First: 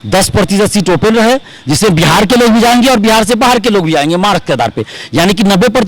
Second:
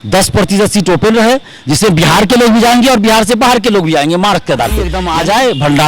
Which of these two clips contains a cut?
second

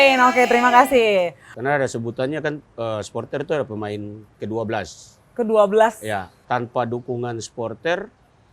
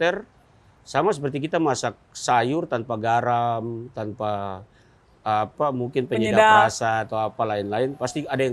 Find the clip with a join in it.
first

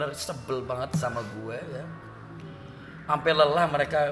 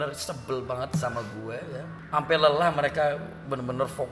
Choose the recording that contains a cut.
second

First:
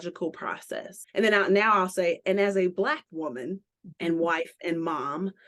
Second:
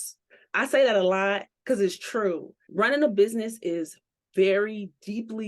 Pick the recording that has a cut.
second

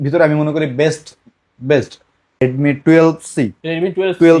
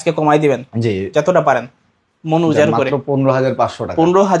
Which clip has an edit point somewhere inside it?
first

